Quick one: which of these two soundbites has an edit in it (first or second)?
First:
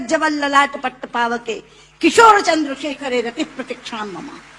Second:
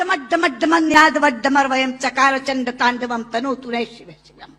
second